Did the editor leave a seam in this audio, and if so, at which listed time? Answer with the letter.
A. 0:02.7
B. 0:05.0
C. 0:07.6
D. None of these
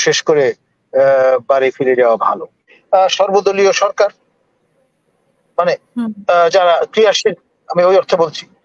A